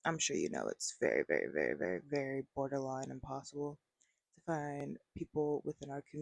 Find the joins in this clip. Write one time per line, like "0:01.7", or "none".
none